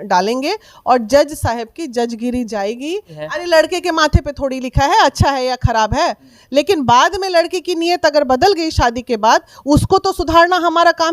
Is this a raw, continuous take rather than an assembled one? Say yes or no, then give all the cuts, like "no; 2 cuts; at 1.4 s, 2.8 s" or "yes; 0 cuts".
no; 1 cut; at 3.1 s